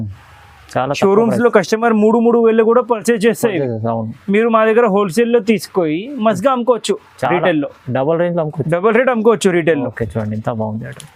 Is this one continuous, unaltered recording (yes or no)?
yes